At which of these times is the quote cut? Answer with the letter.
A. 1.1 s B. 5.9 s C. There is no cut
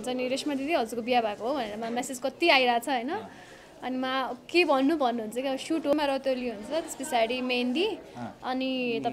B